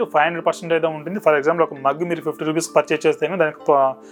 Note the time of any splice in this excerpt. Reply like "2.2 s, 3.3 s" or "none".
none